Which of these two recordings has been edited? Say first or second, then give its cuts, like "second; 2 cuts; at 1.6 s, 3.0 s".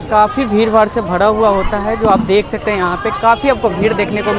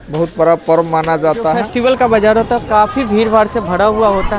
second; 1 cut; at 1.7 s